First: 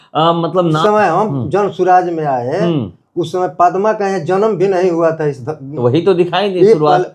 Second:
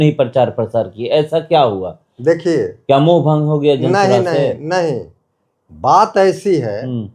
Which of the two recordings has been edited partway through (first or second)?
first